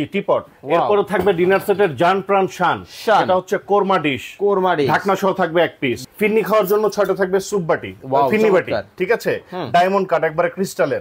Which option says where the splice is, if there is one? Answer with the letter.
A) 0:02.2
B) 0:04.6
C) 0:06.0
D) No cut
C